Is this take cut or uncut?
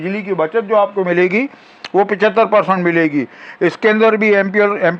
uncut